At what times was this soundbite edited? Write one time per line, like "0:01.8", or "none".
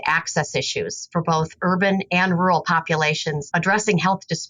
0:01.0
0:03.4